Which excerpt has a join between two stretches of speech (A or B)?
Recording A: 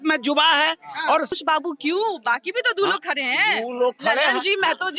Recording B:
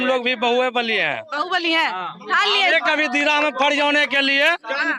A